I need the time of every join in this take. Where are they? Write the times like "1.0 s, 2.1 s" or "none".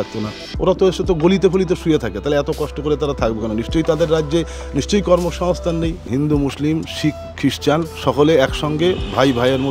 6.0 s, 7.9 s